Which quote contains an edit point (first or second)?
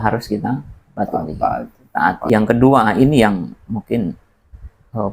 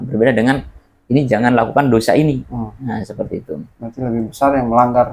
first